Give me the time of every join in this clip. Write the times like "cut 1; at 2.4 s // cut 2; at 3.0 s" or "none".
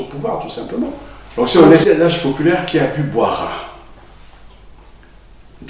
cut 1; at 1.8 s